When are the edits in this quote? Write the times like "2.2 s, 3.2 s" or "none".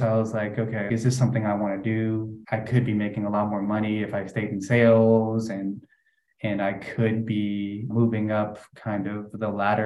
0.9 s, 2.4 s, 7.9 s